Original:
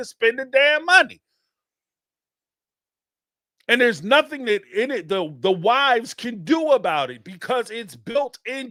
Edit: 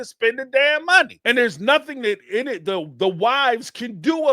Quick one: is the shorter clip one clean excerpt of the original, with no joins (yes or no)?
no